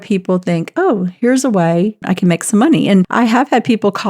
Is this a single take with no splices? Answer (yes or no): no